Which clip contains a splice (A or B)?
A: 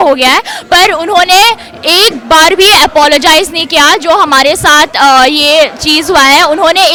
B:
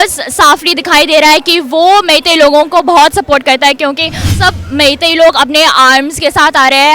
B